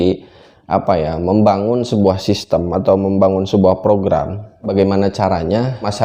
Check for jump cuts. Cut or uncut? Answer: cut